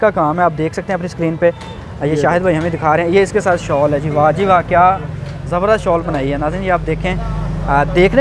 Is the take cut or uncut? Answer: uncut